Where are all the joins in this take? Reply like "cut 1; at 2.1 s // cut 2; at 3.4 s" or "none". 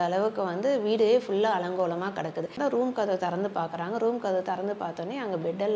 cut 1; at 2.5 s